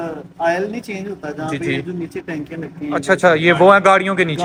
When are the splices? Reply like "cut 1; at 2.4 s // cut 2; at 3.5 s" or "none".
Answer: none